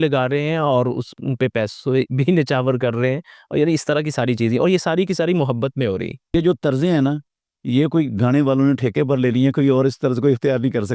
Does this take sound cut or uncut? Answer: cut